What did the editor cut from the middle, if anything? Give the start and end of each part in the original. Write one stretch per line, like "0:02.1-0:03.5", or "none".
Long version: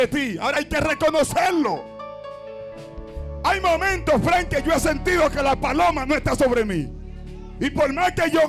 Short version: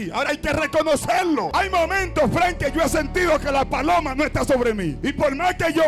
0:01.8-0:03.4
0:06.9-0:07.5